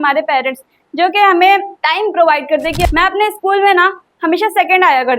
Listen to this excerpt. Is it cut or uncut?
cut